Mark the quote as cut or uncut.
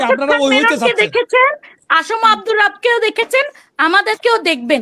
uncut